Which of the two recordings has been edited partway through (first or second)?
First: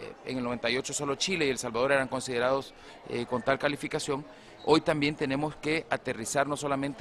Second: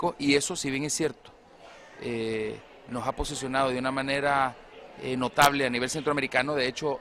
first